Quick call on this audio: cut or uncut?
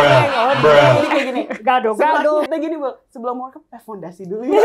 cut